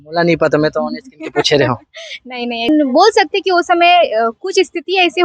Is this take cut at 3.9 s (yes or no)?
no